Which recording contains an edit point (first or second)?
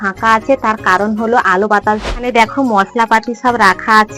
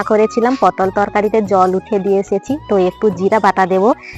first